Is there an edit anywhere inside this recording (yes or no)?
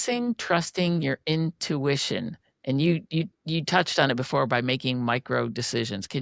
no